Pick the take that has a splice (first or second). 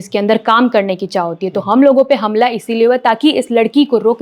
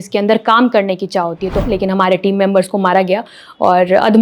second